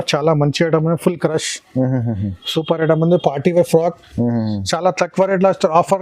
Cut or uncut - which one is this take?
uncut